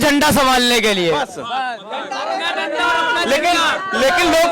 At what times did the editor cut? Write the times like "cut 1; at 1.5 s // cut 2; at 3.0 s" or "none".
none